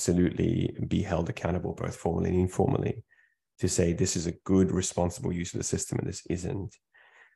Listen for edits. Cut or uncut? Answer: uncut